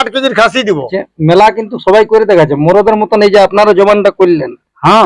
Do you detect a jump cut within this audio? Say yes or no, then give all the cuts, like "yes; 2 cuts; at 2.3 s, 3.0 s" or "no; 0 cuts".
yes; 1 cut; at 1.0 s